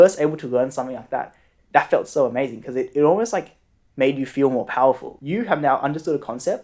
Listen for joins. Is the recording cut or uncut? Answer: cut